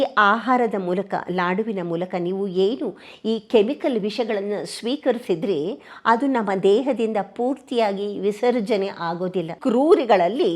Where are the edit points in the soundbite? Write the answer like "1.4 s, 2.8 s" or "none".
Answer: 9.5 s